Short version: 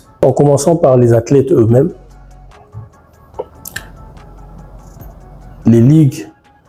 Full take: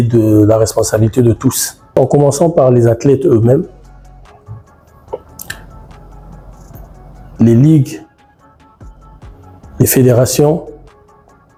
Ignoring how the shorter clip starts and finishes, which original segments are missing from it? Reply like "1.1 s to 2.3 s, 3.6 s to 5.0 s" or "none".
none